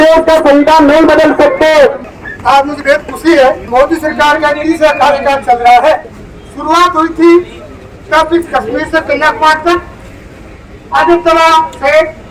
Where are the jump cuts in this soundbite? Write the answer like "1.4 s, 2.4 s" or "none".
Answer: none